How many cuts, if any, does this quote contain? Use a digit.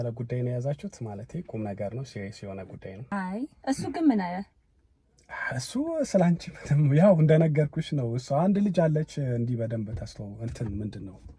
1